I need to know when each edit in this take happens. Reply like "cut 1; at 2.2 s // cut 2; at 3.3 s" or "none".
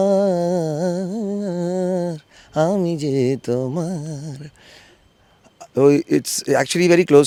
none